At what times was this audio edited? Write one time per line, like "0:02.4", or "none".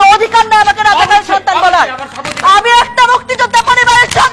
none